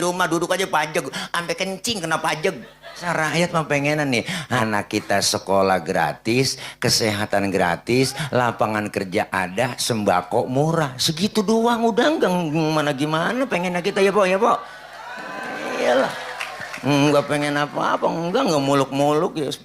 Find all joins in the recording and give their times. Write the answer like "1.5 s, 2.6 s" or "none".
3.0 s, 4.6 s